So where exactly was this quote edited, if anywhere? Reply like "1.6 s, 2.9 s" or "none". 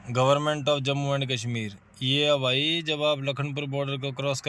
none